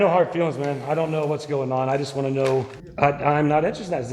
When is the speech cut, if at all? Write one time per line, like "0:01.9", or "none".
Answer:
0:02.8